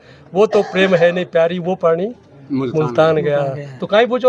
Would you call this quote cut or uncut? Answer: uncut